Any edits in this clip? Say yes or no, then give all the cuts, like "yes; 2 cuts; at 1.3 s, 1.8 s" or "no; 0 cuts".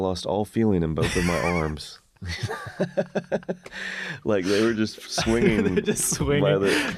no; 0 cuts